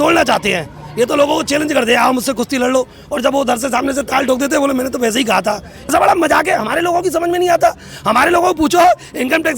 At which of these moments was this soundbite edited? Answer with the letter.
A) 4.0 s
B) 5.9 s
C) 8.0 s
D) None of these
B